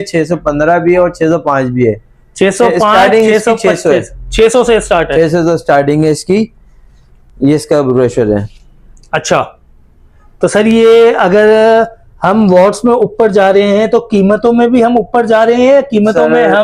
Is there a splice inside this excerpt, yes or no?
no